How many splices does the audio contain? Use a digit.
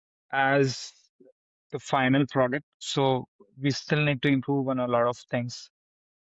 1